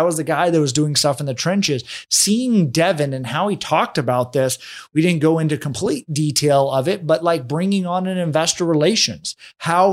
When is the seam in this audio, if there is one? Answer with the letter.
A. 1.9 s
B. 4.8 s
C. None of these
C